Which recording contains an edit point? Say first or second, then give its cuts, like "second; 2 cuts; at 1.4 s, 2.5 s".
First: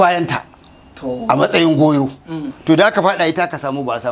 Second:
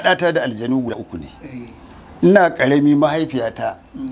second; 1 cut; at 1.0 s